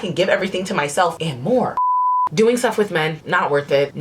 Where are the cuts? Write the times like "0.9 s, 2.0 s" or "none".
2.2 s